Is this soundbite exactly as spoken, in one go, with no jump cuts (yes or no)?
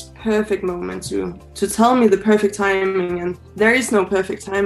no